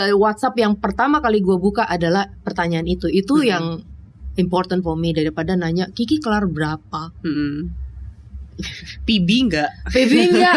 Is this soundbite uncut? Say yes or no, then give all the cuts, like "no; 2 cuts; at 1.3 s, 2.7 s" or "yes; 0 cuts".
yes; 0 cuts